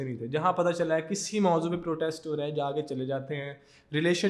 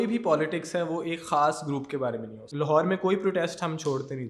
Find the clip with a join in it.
second; 1 cut; at 2.4 s

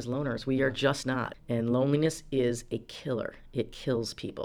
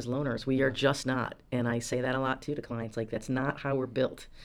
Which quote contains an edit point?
first; 1 cut; at 1.3 s

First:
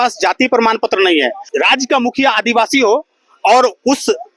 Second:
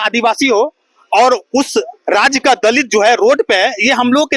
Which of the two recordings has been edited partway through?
first; 1 cut; at 1.4 s

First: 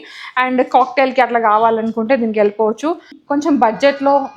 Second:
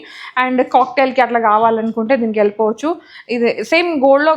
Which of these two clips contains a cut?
first; 1 cut; at 3.1 s

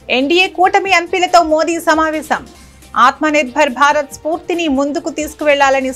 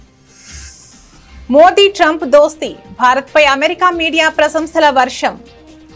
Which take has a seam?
second; 1 cut; at 1.5 s

